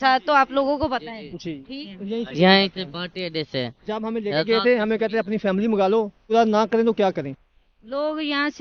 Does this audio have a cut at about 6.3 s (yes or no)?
yes